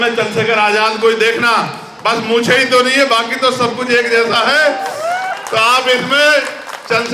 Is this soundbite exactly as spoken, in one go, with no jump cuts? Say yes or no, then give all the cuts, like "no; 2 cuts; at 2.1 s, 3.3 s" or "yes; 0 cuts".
yes; 0 cuts